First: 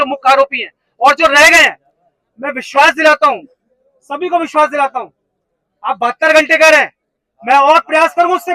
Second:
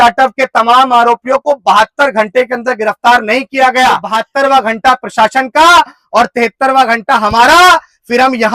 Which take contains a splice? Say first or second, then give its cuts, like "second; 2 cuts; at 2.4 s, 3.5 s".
second; 1 cut; at 4.2 s